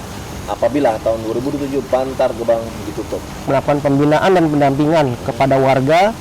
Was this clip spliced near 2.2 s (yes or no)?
no